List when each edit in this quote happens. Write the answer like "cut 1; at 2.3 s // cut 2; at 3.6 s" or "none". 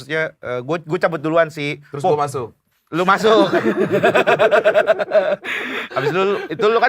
none